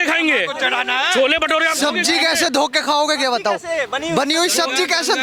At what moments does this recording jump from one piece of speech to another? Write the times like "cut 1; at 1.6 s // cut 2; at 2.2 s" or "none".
none